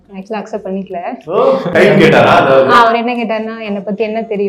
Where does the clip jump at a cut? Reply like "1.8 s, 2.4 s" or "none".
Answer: 1.7 s, 2.8 s